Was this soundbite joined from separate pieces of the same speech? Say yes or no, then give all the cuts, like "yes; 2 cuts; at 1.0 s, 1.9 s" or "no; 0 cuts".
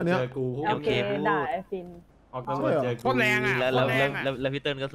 no; 0 cuts